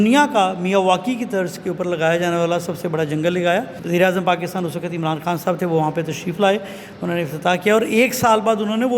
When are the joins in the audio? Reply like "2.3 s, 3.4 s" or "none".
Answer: 3.8 s